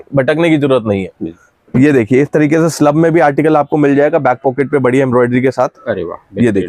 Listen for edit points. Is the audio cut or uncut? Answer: uncut